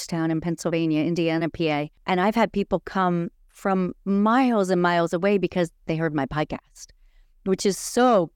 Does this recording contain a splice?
yes; 1 cut; at 1.9 s

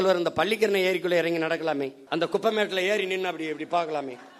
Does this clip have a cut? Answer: yes; 1 cut; at 2.0 s

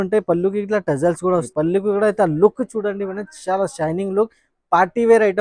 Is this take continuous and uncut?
no; 1 cut; at 1.5 s

